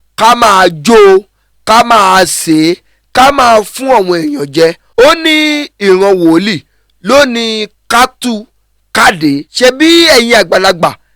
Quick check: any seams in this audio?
yes; 2 cuts; at 4.8 s, 9.5 s

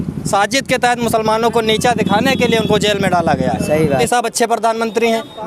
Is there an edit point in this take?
yes; 1 cut; at 4.0 s

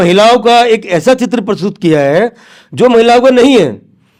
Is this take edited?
no; 0 cuts

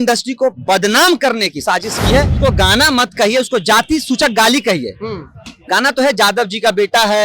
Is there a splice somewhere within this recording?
yes; 1 cut; at 2.3 s

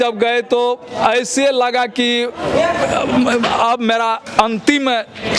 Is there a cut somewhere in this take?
no; 0 cuts

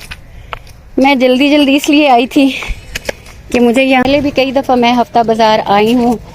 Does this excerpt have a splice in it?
yes; 1 cut; at 4.0 s

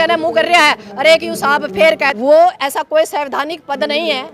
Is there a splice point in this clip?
yes; 1 cut; at 2.1 s

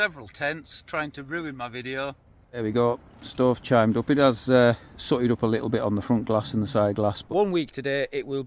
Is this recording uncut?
no; 2 cuts; at 2.6 s, 7.2 s

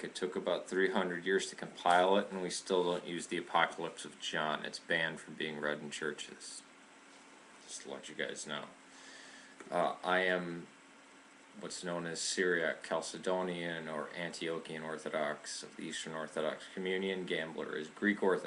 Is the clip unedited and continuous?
yes; 0 cuts

